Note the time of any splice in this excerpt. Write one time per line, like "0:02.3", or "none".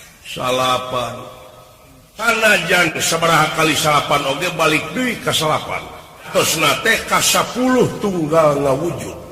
0:02.2
0:06.3